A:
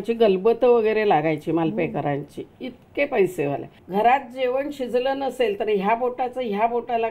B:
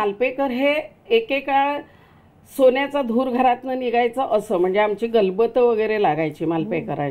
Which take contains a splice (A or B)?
A